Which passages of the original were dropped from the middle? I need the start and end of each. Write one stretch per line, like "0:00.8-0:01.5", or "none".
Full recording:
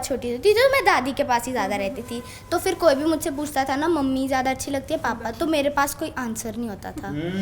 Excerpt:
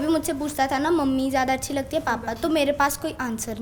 none

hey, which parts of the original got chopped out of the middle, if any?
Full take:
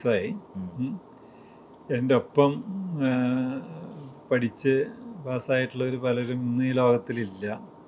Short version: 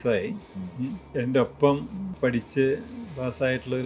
0:01.0-0:01.8
0:02.8-0:04.1

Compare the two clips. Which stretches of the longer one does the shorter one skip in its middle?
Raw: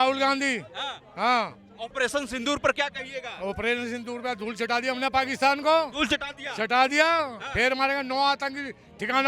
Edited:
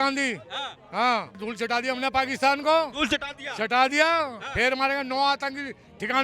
0:01.6-0:04.4

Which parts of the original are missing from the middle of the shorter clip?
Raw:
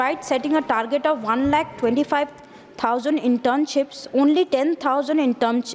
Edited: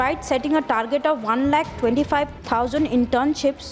0:02.4-0:02.7

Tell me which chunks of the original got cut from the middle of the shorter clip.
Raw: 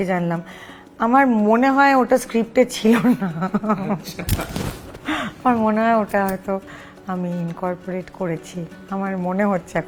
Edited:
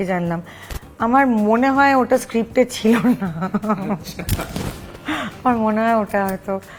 none

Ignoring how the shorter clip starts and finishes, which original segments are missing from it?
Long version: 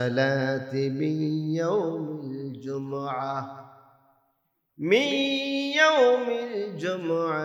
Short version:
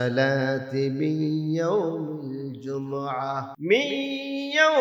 0:03.5-0:04.7

